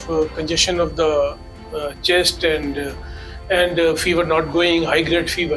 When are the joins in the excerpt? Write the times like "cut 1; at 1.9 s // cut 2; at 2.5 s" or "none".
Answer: none